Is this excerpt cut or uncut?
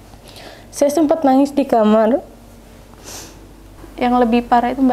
cut